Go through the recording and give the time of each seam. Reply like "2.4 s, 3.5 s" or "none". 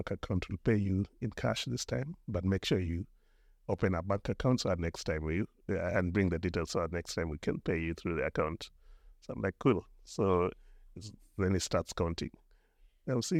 none